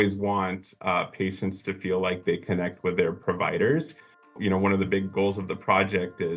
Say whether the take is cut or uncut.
cut